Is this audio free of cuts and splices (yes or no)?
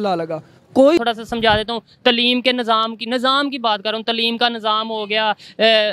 no